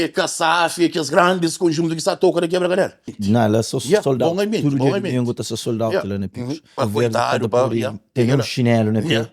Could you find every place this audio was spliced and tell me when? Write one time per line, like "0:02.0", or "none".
0:03.1
0:06.7